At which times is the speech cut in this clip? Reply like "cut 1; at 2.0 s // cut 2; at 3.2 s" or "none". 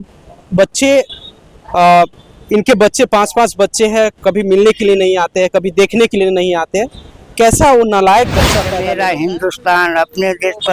cut 1; at 8.7 s